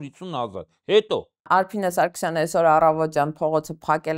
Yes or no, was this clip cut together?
yes